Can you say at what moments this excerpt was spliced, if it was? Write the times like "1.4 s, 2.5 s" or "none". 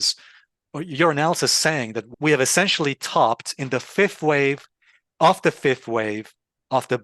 2.0 s

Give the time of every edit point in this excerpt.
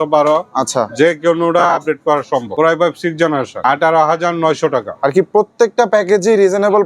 2.5 s, 3.6 s

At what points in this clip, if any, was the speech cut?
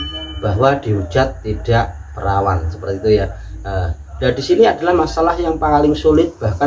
none

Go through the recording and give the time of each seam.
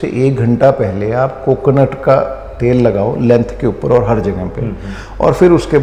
none

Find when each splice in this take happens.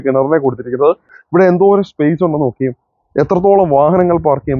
1.1 s

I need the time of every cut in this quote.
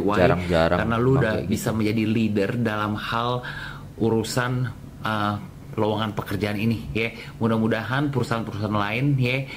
none

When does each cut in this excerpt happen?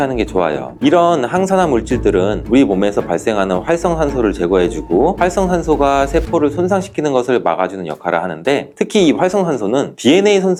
none

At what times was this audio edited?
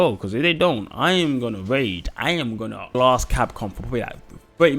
2.8 s

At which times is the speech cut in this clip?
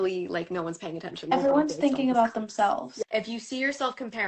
1.3 s, 2.9 s

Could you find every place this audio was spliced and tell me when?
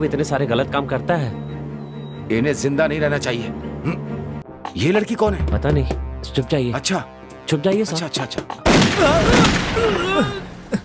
4.4 s, 8.6 s

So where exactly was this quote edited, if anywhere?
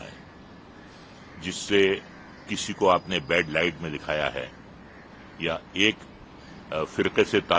none

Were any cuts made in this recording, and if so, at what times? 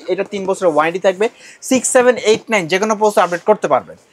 none

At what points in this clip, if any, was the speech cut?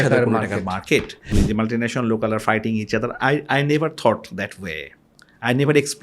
1.3 s

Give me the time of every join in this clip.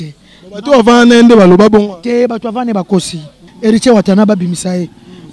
3.4 s

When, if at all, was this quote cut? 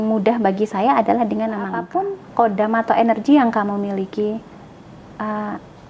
1.9 s

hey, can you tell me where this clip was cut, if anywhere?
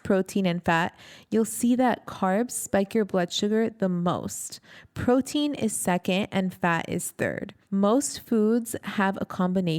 7.5 s

